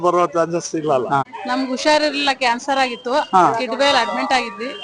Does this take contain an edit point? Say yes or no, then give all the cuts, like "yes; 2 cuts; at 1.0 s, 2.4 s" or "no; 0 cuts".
yes; 1 cut; at 1.3 s